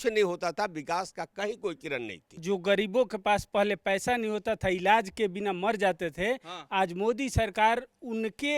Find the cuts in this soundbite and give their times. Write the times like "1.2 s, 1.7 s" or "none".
2.4 s